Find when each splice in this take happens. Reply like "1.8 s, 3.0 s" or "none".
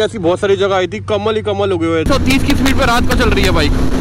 2.1 s